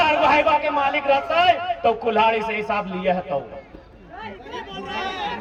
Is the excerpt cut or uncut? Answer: uncut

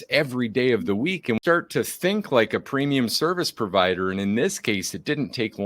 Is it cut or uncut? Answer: cut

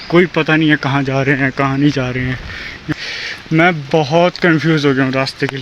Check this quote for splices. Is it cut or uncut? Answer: cut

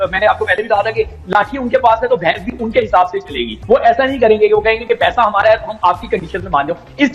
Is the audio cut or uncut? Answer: cut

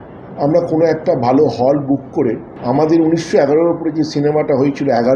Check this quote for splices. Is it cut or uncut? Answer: cut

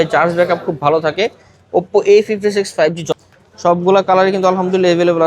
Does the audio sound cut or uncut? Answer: cut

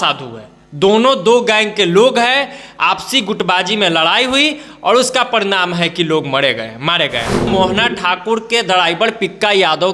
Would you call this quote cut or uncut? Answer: cut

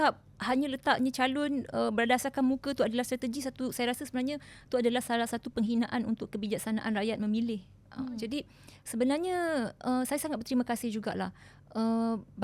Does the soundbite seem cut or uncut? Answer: uncut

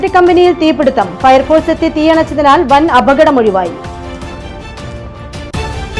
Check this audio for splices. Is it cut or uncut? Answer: uncut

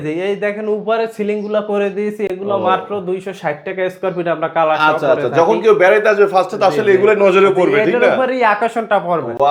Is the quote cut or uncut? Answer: uncut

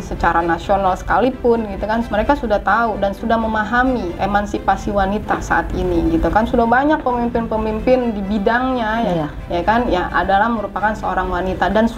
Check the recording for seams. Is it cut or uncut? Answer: cut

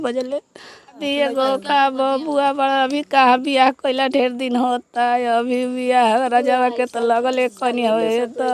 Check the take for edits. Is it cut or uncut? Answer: cut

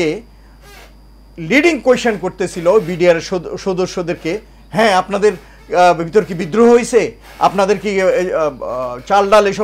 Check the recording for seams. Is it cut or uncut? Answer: uncut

